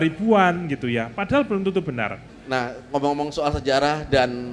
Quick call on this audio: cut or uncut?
cut